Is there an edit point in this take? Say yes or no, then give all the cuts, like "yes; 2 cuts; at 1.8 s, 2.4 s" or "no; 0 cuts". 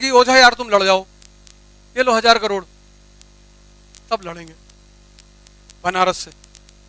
no; 0 cuts